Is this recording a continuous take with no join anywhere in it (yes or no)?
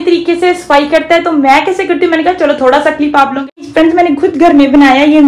no